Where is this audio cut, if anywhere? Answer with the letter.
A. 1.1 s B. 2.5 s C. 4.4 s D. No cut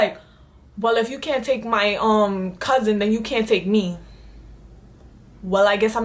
D